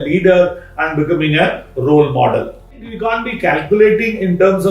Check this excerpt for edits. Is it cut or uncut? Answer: cut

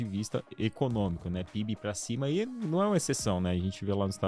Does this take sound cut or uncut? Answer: uncut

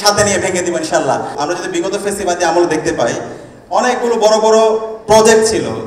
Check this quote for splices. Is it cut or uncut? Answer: cut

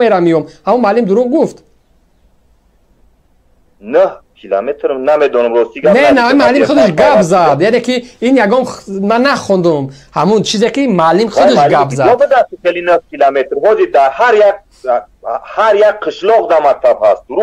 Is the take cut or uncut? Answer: uncut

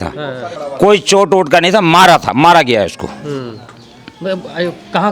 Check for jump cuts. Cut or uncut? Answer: uncut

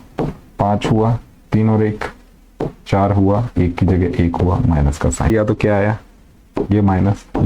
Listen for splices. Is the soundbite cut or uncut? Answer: cut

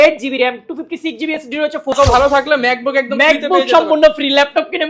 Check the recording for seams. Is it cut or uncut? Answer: cut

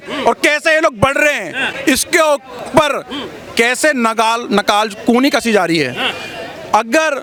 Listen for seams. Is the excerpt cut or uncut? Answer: uncut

